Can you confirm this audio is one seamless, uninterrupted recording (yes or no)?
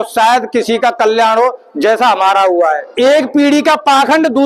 no